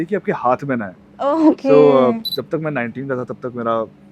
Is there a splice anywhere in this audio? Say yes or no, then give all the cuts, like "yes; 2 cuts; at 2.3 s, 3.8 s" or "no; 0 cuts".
yes; 1 cut; at 2.4 s